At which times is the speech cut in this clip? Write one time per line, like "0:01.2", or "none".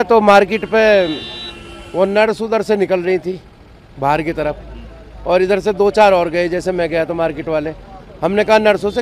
none